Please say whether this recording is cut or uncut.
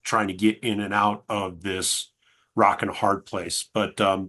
uncut